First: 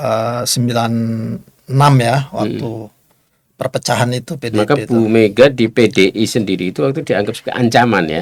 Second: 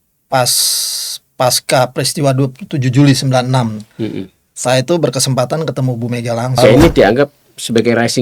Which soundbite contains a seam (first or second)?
second